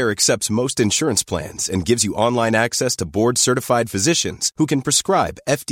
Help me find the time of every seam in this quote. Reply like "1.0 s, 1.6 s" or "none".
none